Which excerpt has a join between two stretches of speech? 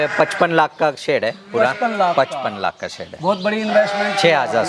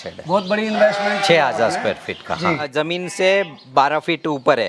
second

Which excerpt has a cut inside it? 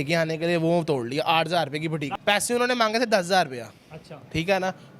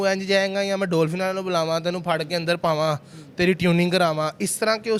first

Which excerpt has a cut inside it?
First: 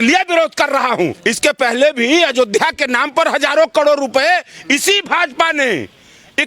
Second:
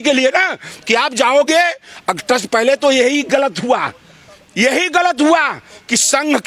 first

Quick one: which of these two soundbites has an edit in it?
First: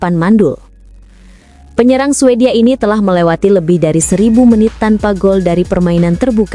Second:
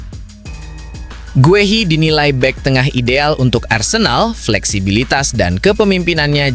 second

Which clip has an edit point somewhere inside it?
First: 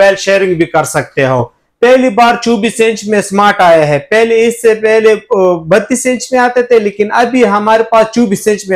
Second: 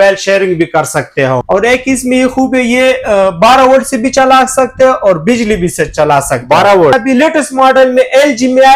second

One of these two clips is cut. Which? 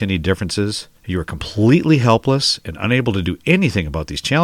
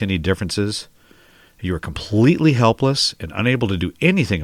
first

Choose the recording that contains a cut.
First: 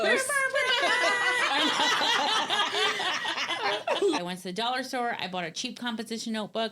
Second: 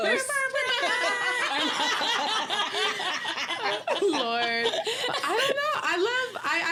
first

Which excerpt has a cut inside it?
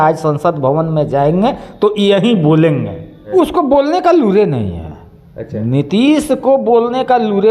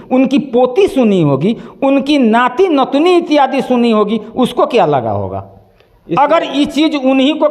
first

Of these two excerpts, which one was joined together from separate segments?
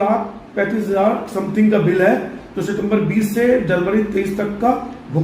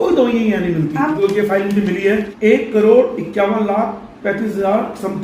second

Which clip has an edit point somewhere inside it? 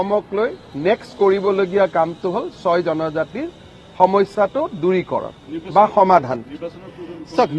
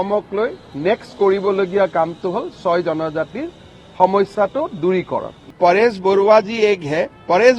second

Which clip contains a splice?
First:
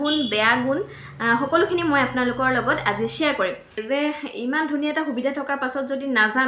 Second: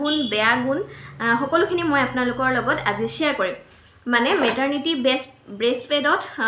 first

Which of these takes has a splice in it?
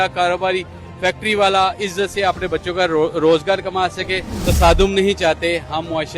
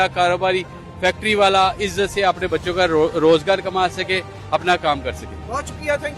first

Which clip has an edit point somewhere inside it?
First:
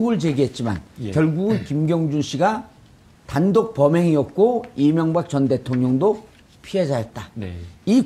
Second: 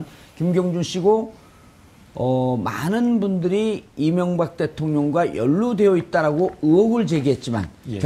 first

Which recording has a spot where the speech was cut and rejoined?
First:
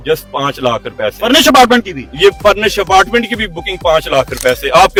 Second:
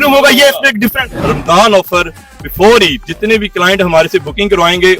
second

